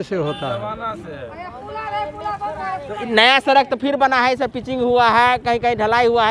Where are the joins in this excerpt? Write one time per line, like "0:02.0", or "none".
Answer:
none